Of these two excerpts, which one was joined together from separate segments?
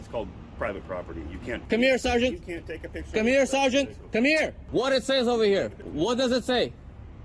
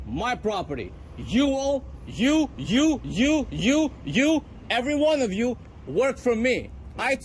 first; 3 cuts; at 1.6 s, 4.6 s, 5.8 s

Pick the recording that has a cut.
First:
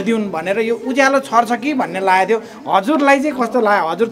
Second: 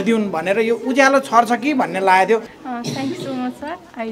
second; 1 cut; at 2.5 s

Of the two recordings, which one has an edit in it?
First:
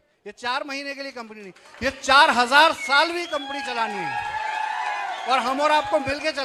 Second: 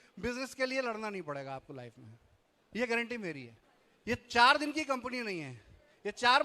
second; 1 cut; at 4.0 s

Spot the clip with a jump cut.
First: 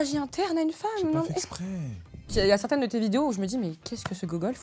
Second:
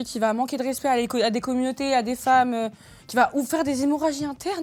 first; 1 cut; at 2.3 s

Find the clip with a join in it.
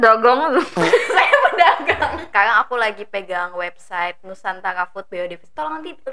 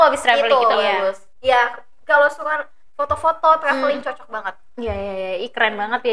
first; 1 cut; at 2.2 s

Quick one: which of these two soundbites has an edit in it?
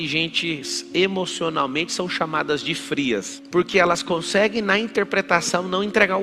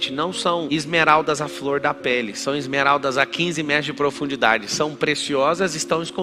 first; 1 cut; at 3.4 s

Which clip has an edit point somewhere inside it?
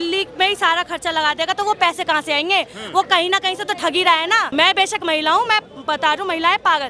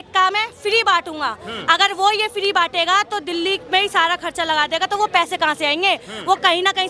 first; 1 cut; at 4.5 s

